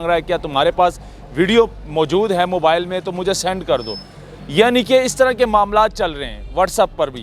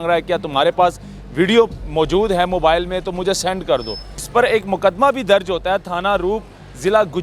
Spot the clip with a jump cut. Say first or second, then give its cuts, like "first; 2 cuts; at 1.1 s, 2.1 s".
second; 1 cut; at 4.2 s